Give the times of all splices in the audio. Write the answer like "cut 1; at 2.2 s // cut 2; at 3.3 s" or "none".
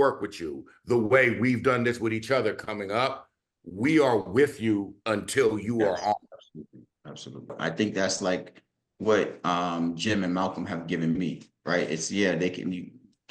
cut 1; at 7.6 s